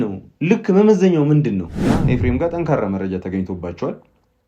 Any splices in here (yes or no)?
yes